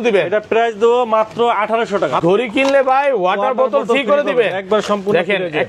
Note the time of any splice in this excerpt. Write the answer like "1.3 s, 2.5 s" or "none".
2.2 s